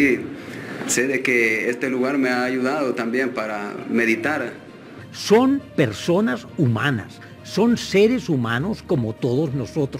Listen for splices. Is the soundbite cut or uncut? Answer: cut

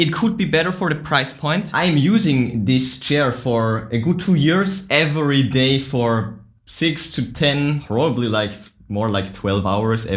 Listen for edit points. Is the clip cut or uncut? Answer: cut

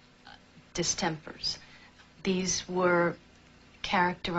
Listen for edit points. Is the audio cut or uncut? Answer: uncut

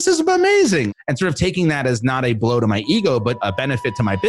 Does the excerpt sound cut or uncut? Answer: cut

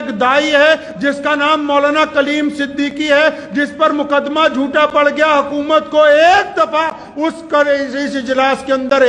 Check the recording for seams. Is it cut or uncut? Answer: uncut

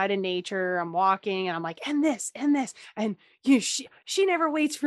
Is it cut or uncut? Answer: cut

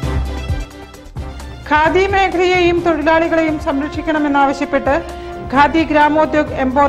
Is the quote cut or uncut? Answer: cut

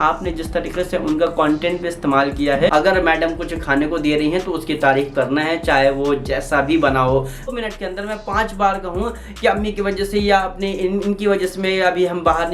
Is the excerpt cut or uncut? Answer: cut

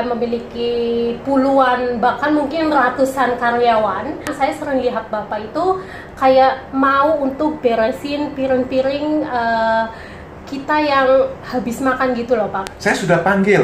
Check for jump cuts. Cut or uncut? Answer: cut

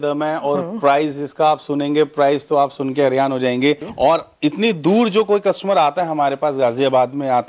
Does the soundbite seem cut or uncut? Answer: cut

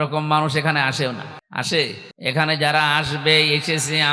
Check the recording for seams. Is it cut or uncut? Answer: cut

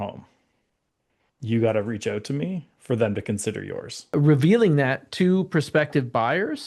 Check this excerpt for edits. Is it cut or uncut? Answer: cut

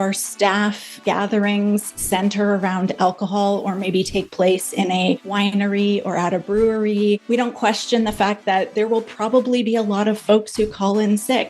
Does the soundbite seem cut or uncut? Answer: cut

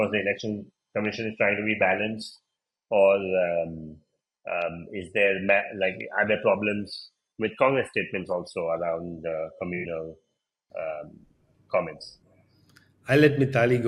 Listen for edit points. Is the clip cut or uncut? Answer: uncut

